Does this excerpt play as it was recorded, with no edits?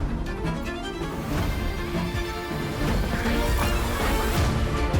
yes; 0 cuts

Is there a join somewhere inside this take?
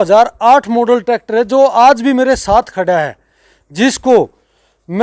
no; 0 cuts

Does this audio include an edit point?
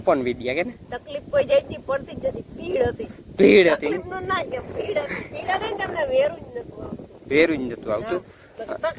no; 0 cuts

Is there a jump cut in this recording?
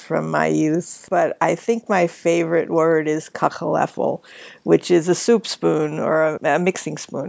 no; 0 cuts

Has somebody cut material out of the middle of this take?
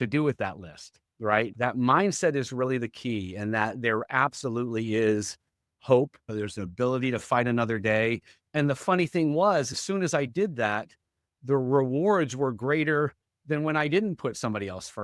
yes; 2 cuts; at 1.5 s, 8.3 s

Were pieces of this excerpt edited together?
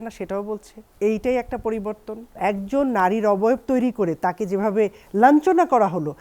yes; 1 cut; at 2.3 s

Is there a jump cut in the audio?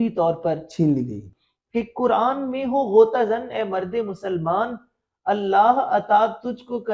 yes; 1 cut; at 1.3 s

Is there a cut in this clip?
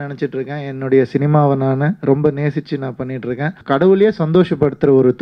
yes; 1 cut; at 3.6 s

